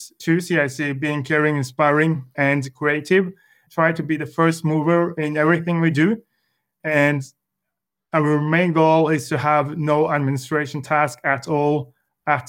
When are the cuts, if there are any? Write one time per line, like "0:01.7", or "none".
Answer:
0:03.6